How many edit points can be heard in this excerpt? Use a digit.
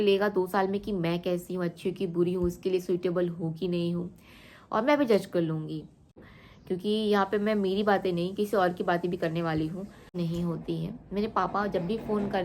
2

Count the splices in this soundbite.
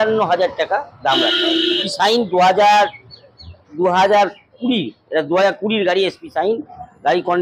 1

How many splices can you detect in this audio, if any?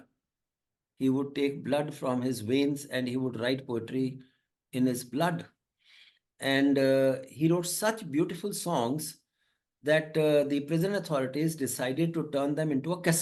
0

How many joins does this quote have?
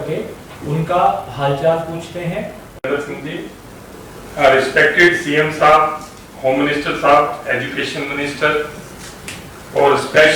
1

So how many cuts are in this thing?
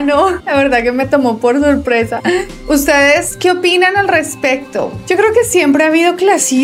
0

